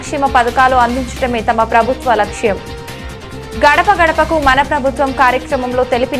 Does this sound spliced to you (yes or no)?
no